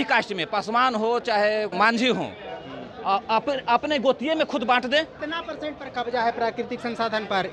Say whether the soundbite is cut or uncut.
cut